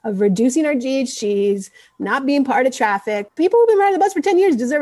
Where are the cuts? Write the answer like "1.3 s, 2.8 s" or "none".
3.2 s